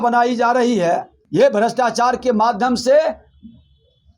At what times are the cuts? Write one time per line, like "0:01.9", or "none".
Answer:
0:01.2